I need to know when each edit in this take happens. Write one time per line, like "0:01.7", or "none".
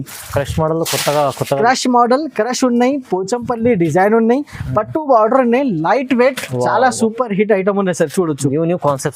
none